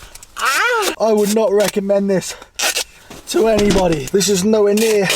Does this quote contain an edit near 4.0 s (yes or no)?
yes